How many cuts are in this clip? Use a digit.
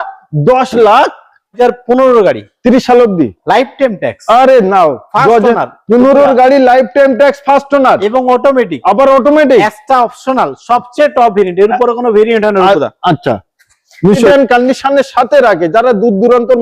2